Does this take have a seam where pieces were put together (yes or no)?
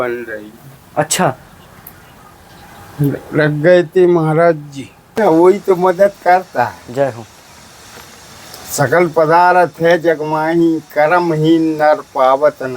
yes